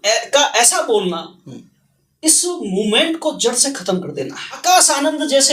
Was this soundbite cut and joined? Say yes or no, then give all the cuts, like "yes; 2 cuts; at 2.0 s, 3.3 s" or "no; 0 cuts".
yes; 1 cut; at 4.6 s